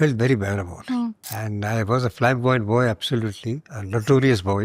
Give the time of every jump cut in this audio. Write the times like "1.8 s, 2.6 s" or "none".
1.3 s